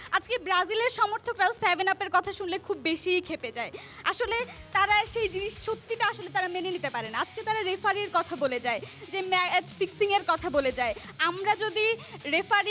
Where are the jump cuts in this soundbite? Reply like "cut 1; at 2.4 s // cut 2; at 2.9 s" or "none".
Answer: none